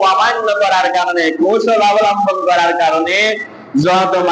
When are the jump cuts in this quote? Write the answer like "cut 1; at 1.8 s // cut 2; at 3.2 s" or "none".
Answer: none